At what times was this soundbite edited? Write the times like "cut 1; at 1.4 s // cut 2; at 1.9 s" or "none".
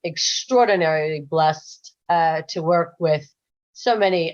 none